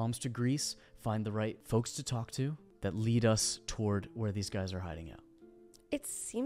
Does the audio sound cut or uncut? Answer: cut